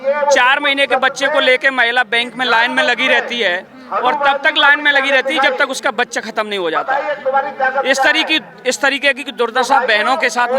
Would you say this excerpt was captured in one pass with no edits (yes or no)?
yes